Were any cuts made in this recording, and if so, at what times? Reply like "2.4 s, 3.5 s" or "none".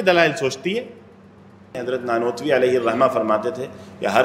1.8 s